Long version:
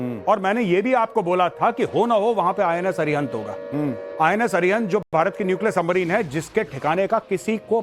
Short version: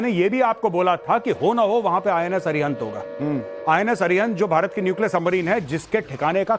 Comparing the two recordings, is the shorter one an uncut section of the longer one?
no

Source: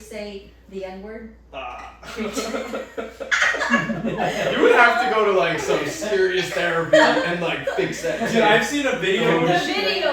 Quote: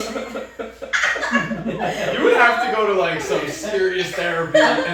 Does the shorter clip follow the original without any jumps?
yes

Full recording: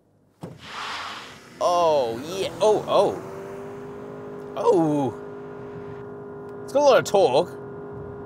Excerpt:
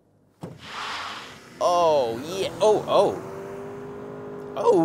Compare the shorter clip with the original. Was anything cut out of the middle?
no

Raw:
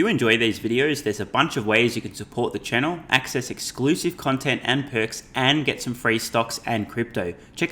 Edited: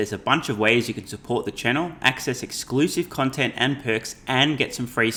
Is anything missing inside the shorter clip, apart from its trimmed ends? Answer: no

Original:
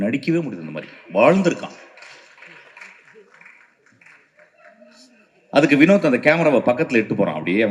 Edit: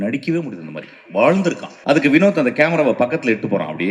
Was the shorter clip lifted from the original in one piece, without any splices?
no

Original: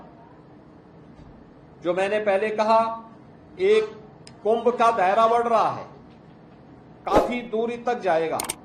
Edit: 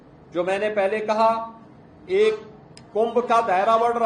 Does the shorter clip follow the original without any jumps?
yes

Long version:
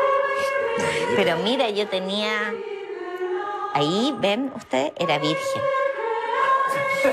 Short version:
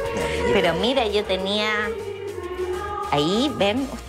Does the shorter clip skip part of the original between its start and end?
no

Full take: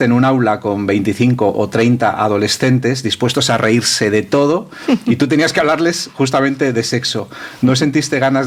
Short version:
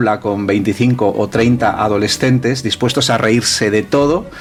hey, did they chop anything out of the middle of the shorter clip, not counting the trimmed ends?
no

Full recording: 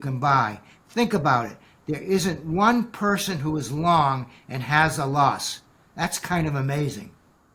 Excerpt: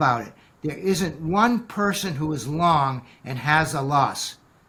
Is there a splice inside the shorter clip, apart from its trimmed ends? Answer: no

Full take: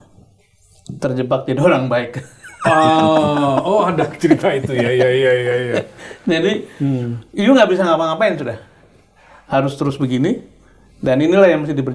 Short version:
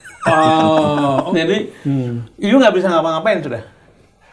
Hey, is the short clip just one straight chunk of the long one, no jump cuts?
no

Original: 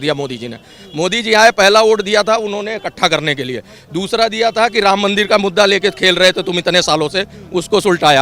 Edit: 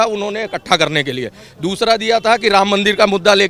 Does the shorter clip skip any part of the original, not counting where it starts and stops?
no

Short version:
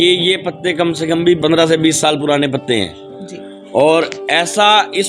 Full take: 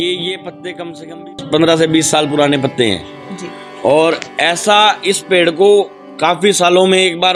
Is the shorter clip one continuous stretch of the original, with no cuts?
no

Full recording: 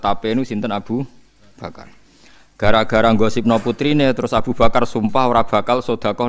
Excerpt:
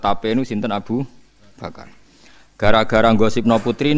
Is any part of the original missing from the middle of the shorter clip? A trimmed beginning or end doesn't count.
no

